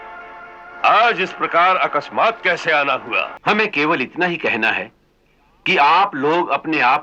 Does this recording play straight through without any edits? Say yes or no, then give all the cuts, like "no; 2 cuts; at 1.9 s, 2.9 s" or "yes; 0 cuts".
no; 1 cut; at 3.3 s